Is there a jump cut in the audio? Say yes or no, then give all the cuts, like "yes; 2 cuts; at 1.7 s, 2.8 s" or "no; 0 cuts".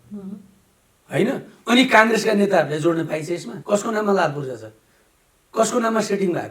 yes; 1 cut; at 3.5 s